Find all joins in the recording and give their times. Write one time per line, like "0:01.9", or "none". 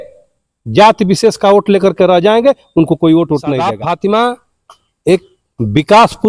0:03.7